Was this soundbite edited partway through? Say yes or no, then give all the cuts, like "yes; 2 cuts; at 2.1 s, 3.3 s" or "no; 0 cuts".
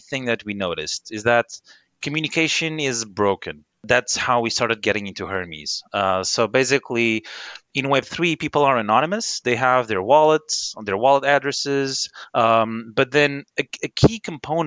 no; 0 cuts